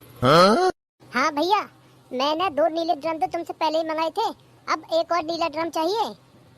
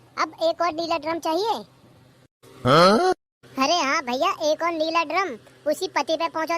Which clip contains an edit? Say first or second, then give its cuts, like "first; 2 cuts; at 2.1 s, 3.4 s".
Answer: first; 1 cut; at 0.9 s